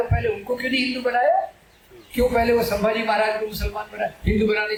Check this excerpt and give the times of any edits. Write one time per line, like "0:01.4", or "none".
none